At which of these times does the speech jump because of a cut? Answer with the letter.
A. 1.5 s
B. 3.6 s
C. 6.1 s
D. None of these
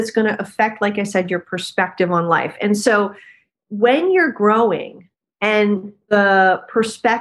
C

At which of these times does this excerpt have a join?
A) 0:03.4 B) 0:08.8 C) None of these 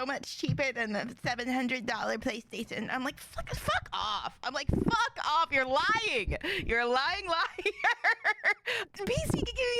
B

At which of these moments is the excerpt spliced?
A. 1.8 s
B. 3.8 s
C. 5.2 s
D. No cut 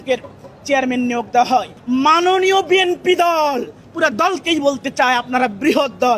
A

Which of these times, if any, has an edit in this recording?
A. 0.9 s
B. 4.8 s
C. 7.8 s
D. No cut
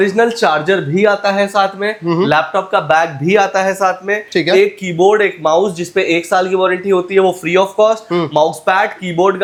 D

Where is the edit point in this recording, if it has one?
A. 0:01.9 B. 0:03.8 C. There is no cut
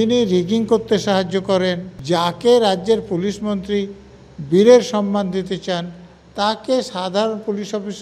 A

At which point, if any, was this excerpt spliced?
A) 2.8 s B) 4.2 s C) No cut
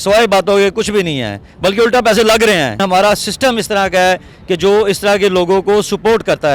A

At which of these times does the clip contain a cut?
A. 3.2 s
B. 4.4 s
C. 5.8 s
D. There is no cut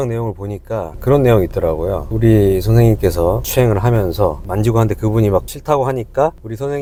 D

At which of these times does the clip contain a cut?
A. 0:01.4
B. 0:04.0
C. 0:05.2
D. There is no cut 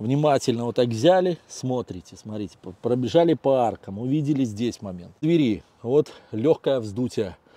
C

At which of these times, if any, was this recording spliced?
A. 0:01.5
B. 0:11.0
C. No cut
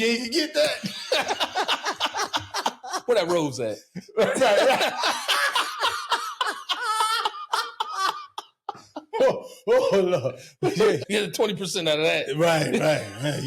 B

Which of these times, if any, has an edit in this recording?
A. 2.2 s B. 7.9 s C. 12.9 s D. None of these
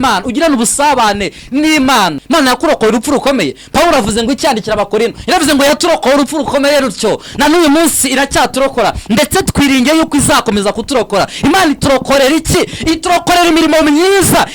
A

